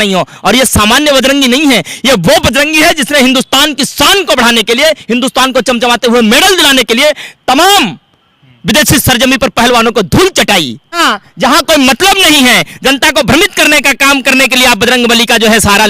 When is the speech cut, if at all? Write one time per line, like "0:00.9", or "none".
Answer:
0:11.0

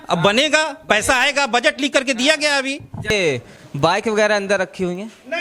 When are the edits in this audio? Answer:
0:02.9

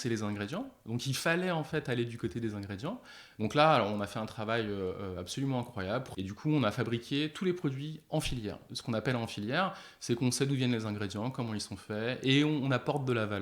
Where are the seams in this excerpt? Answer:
0:06.1
0:08.7

